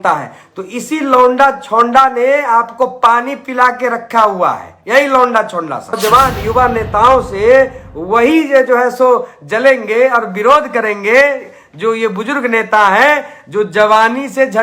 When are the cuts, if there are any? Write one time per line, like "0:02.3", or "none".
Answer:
0:06.0